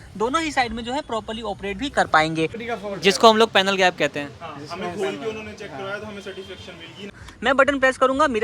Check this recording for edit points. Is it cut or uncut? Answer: cut